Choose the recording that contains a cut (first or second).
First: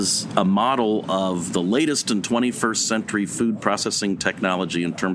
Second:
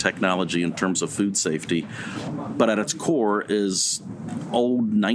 second